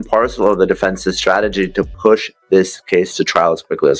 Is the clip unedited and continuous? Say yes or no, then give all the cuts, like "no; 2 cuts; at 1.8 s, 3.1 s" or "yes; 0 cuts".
yes; 0 cuts